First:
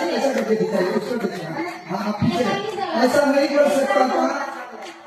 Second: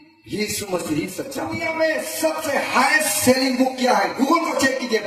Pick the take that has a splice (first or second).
second